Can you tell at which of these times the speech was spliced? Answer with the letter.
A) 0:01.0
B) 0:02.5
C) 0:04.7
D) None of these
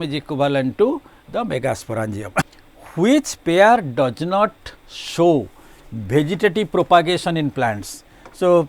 B